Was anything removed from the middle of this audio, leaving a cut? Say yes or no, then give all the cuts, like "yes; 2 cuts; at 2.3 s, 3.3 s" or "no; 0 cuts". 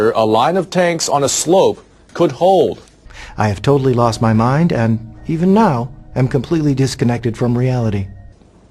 yes; 1 cut; at 1.3 s